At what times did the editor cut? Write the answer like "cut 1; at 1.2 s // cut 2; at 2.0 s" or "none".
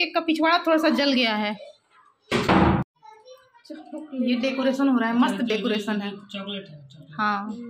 cut 1; at 3.0 s